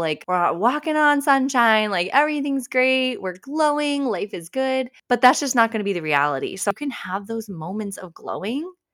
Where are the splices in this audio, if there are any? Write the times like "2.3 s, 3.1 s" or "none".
6.7 s